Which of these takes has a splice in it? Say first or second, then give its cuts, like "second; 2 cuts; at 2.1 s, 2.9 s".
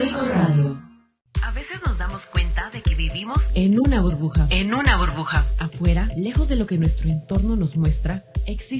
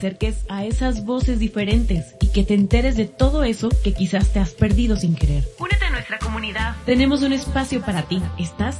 first; 1 cut; at 1.2 s